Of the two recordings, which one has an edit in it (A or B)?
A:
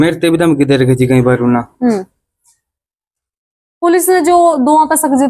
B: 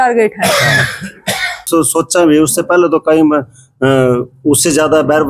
B